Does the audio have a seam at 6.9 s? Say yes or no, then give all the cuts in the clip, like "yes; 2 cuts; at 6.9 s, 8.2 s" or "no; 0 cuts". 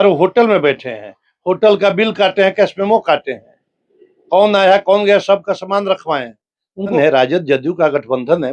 yes; 1 cut; at 6.9 s